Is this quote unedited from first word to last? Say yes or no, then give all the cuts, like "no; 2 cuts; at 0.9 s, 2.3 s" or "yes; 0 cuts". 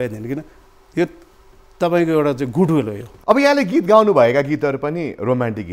no; 1 cut; at 3.1 s